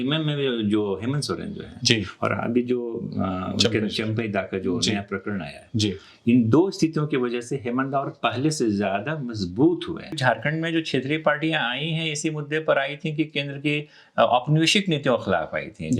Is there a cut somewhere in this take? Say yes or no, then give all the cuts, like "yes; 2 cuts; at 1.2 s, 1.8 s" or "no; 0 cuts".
yes; 1 cut; at 10.2 s